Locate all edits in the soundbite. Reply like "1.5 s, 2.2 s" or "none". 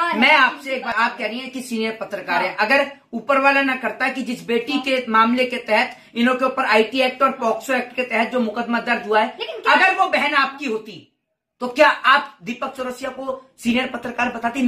0.9 s